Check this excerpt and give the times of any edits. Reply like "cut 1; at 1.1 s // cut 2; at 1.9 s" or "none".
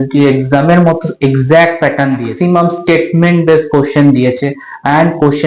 cut 1; at 2.3 s